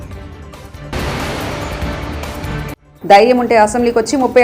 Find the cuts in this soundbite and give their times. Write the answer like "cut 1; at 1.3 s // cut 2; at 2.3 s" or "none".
cut 1; at 0.9 s // cut 2; at 2.8 s

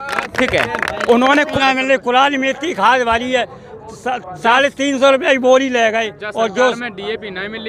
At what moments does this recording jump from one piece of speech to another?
cut 1; at 1.5 s

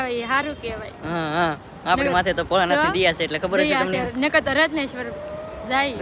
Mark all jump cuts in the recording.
none

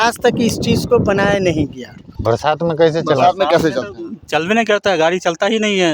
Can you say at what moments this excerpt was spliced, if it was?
cut 1; at 2.1 s

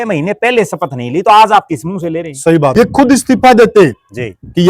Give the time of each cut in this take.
cut 1; at 2.7 s

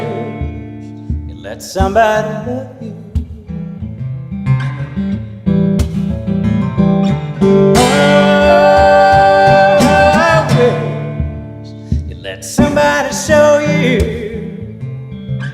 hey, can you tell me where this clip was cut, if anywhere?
cut 1; at 3.6 s

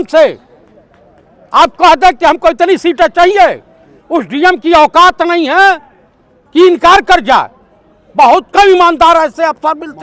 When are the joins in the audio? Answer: none

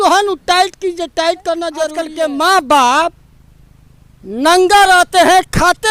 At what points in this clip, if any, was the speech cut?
cut 1; at 2.0 s

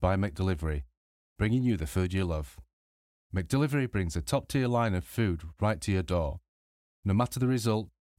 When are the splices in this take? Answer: none

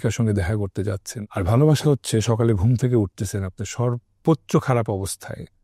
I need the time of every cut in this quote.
cut 1; at 1.1 s

